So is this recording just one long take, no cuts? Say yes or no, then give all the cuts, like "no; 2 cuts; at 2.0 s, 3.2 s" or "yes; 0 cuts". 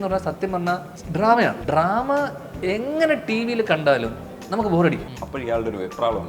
no; 3 cuts; at 1.0 s, 1.6 s, 5.1 s